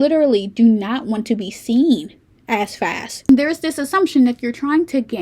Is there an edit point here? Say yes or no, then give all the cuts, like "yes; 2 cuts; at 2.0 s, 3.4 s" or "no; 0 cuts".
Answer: yes; 1 cut; at 3.1 s